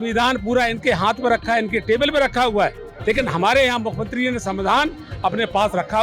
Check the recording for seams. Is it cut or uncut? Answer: cut